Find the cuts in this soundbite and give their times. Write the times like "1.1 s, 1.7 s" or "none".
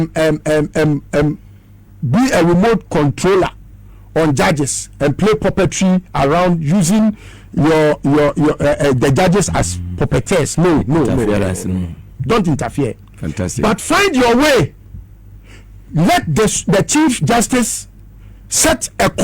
9.2 s